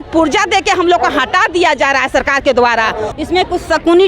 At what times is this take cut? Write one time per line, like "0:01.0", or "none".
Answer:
0:03.1